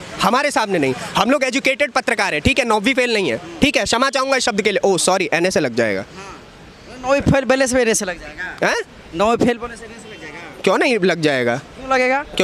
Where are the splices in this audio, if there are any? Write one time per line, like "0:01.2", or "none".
none